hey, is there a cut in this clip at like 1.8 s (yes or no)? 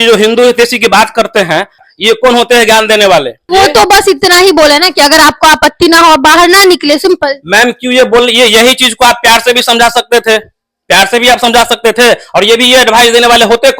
yes